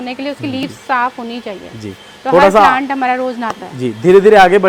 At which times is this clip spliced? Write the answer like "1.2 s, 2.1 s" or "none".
none